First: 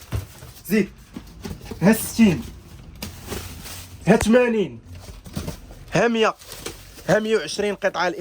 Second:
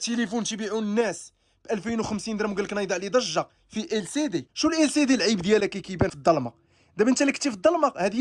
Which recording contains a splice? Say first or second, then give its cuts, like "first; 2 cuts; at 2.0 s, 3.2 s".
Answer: second; 2 cuts; at 4.5 s, 6.1 s